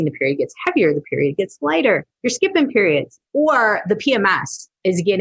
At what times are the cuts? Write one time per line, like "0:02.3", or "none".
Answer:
0:02.2
0:03.2

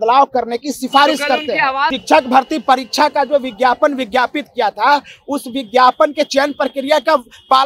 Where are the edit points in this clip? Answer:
0:02.0

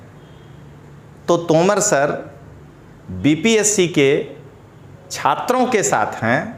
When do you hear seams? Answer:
none

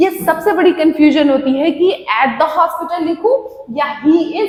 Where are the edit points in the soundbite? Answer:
none

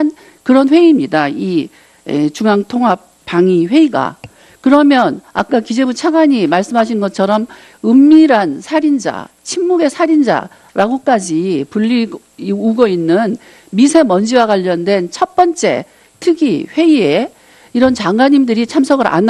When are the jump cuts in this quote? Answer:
none

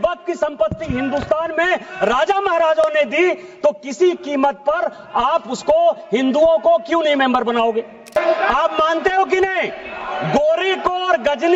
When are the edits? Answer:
0:08.2

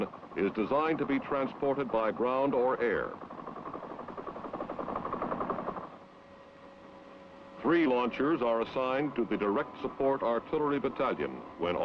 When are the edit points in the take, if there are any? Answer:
0:05.7

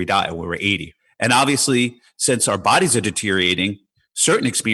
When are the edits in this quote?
0:00.9

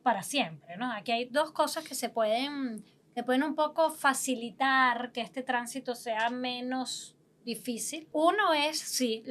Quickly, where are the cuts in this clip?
0:08.1

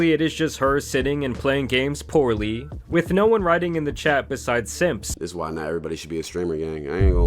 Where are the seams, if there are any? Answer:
0:05.2

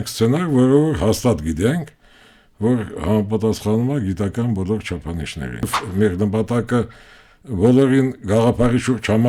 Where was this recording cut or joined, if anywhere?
0:05.8

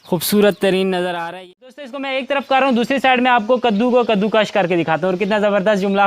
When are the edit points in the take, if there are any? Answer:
0:02.0

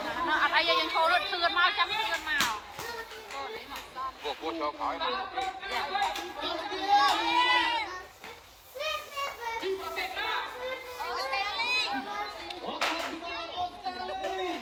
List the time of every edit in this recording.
none

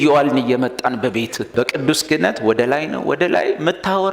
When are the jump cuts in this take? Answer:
0:01.4

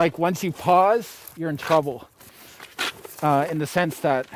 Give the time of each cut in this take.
none

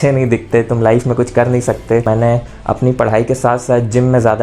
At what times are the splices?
0:02.0

